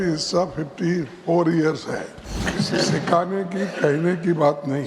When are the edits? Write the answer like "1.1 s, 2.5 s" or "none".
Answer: 2.5 s